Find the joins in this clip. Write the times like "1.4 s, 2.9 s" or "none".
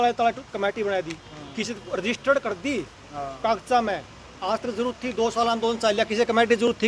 none